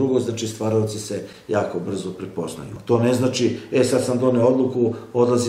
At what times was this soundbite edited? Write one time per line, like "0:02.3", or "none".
0:02.7